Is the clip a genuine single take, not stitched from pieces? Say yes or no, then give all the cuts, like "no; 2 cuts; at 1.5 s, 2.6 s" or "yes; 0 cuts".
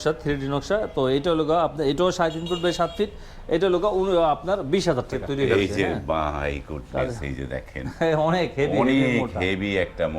no; 1 cut; at 5.2 s